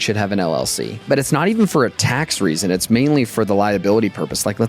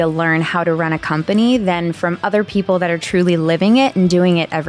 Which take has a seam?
first; 1 cut; at 1.0 s

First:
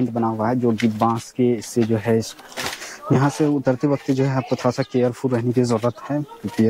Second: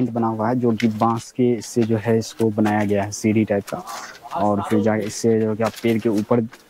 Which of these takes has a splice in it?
first; 1 cut; at 2.3 s

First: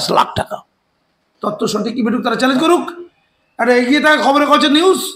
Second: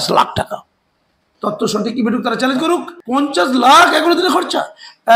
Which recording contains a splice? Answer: second; 1 cut; at 2.9 s

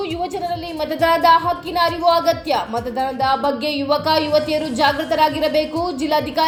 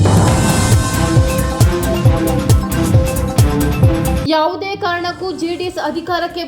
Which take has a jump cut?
second; 1 cut; at 4.2 s

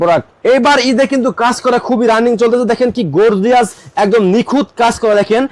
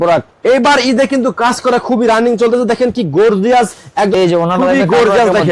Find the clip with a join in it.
second; 1 cut; at 4.1 s

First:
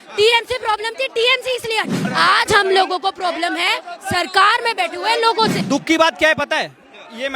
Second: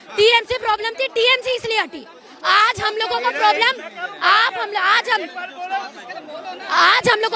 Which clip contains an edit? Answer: first; 2 cuts; at 2.0 s, 5.6 s

